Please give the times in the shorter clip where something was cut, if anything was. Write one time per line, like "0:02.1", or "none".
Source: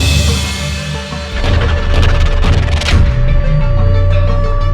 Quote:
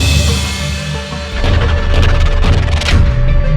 none